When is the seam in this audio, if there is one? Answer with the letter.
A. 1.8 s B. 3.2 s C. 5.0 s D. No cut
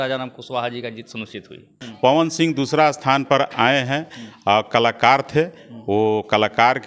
A